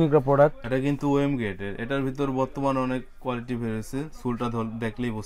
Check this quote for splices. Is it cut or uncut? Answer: uncut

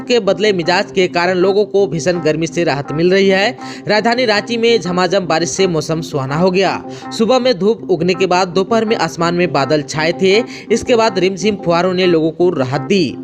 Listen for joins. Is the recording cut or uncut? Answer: uncut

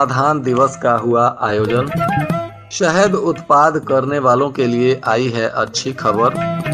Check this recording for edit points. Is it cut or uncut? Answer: uncut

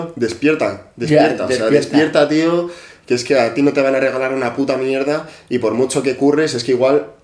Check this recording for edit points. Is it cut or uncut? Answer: uncut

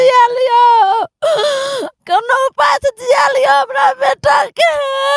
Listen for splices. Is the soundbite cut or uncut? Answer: uncut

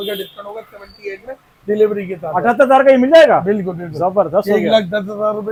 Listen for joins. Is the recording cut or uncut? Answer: uncut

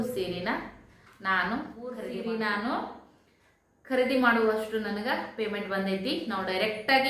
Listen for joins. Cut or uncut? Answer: cut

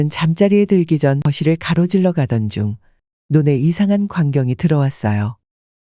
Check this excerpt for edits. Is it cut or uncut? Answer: cut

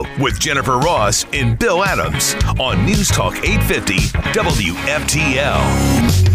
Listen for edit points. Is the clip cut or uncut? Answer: uncut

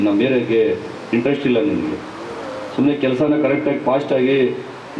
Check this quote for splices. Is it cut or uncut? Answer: uncut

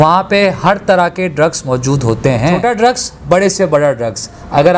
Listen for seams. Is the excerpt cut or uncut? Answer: cut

